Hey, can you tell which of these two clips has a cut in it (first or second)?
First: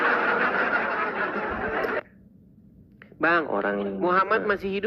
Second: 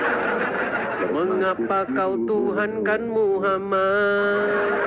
second